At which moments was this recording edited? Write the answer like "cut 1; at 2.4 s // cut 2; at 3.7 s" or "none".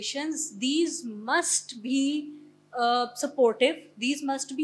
none